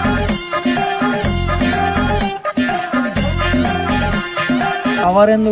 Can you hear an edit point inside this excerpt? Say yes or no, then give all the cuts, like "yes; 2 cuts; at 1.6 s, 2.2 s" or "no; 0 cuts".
no; 0 cuts